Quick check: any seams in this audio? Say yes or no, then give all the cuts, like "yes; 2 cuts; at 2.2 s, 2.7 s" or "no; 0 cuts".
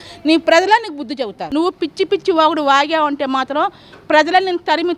yes; 1 cut; at 1.4 s